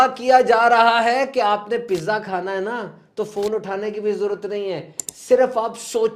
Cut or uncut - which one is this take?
uncut